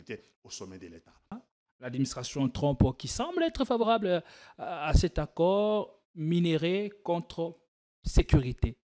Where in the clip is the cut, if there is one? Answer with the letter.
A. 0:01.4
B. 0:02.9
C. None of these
A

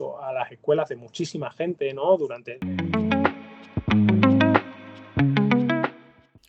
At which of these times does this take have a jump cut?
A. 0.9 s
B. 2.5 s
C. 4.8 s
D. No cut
B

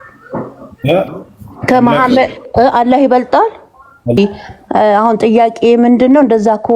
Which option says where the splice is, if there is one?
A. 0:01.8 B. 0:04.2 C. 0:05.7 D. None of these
B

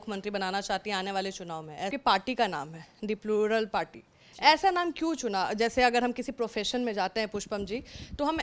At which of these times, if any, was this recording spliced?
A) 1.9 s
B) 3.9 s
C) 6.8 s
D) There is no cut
A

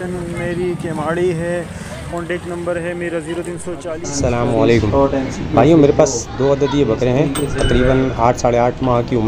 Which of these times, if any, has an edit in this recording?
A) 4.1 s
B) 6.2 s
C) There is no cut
A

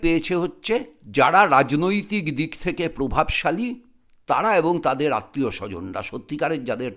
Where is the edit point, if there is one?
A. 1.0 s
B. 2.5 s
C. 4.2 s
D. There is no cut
A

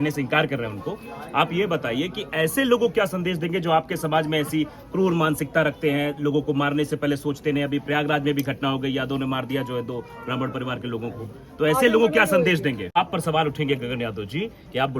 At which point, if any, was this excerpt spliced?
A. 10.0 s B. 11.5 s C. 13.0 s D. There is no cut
C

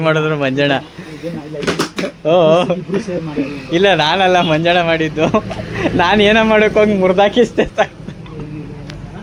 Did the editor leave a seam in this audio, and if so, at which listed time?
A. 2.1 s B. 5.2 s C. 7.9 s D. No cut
D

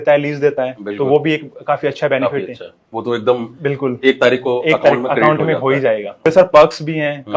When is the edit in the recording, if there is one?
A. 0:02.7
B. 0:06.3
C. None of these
B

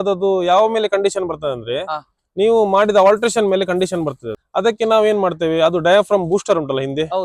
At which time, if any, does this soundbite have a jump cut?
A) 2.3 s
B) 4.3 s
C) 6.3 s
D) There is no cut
B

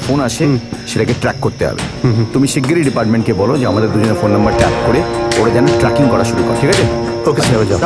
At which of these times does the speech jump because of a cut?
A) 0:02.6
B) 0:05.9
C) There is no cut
C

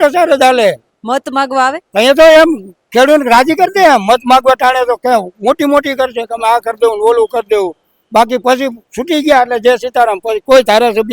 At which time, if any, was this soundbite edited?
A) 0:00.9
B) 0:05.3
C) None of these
A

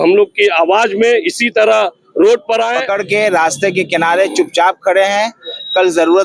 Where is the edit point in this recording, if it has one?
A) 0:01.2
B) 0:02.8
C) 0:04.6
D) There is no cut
B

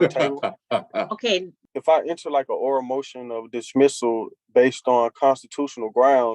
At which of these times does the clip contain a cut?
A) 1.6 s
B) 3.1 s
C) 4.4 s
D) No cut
A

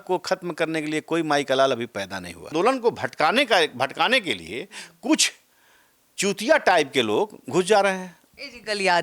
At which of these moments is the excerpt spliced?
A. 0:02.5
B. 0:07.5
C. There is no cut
A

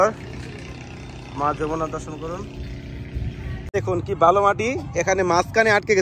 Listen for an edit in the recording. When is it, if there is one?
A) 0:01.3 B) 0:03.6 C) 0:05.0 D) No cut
B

